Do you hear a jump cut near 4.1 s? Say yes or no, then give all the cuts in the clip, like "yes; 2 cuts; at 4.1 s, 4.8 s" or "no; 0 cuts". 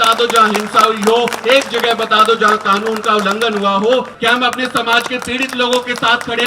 yes; 1 cut; at 4.1 s